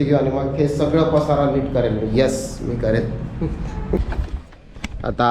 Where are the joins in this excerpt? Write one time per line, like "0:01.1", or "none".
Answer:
0:04.0